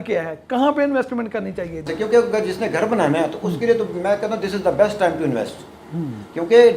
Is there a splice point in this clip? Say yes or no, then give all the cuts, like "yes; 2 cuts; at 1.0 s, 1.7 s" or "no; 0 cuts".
yes; 1 cut; at 1.8 s